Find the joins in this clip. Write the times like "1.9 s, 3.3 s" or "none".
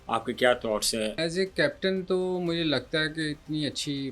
1.2 s